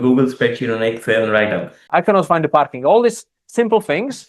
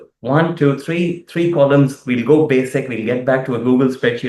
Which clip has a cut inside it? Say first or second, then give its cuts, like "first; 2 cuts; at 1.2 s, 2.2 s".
first; 1 cut; at 1.8 s